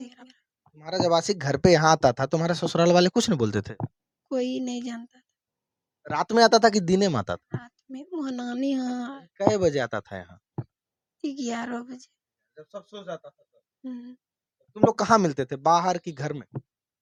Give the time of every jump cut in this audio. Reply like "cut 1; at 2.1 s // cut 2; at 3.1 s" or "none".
none